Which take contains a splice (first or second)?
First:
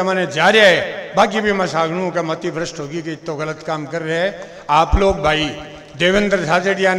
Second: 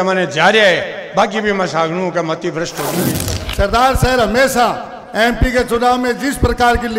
second